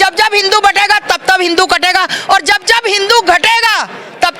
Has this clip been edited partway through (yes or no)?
no